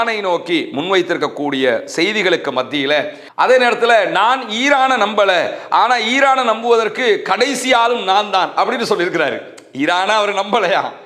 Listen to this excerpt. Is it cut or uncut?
cut